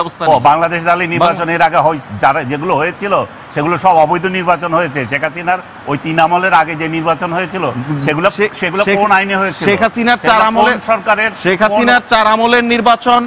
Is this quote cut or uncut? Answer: uncut